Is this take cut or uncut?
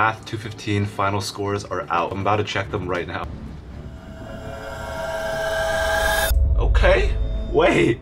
cut